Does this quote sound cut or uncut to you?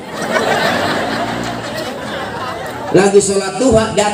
uncut